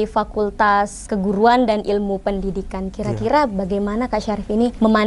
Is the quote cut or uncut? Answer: uncut